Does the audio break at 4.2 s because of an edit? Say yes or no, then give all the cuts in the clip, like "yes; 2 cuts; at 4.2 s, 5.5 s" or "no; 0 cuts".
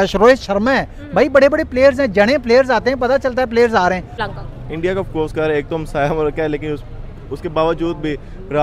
yes; 1 cut; at 4.2 s